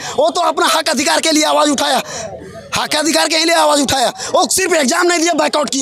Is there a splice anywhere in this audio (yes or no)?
no